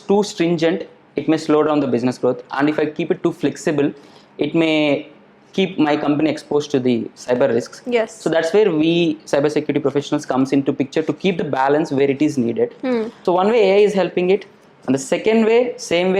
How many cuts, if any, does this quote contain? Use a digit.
1